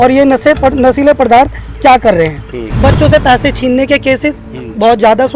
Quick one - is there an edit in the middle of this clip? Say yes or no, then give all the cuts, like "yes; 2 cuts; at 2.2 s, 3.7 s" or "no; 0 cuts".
yes; 1 cut; at 2.7 s